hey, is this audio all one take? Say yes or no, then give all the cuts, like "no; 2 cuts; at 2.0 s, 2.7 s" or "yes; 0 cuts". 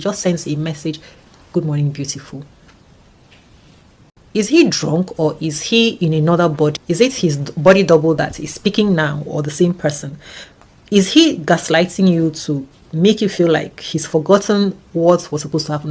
no; 2 cuts; at 4.1 s, 6.8 s